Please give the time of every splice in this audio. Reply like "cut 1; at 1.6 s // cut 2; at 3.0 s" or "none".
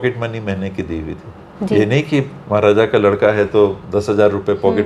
cut 1; at 1.4 s